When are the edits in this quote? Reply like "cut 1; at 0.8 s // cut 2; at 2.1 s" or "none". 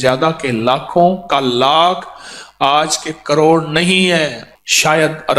cut 1; at 4.4 s